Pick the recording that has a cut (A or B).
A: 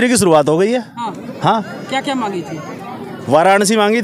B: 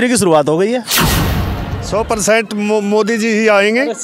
B